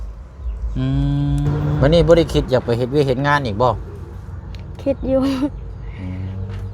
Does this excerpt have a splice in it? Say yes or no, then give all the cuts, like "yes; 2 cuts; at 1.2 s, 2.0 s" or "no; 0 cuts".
yes; 1 cut; at 1.8 s